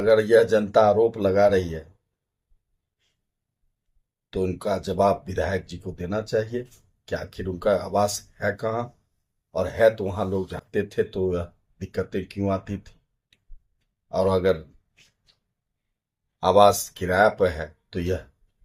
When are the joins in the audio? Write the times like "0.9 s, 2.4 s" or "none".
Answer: none